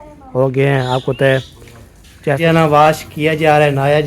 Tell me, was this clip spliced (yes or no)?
yes